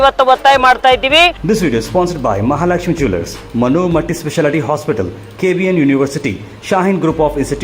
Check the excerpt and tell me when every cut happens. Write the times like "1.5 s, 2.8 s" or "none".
1.4 s